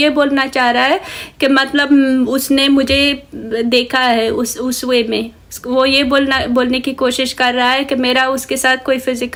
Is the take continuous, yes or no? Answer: yes